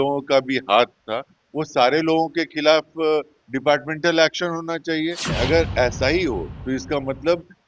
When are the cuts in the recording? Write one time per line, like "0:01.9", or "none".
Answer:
0:05.3

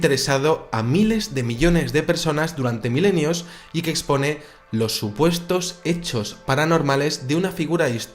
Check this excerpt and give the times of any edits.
0:02.8

